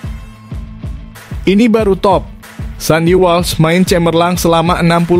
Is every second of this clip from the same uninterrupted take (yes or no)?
no